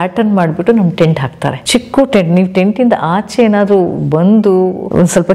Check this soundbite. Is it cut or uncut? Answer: uncut